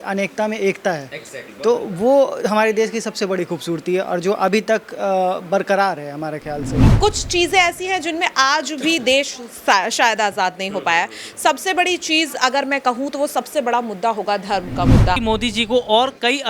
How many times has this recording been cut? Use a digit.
2